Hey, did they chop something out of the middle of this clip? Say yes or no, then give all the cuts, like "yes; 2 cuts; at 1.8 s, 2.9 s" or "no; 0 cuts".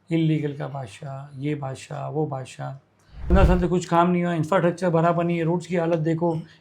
yes; 1 cut; at 3.3 s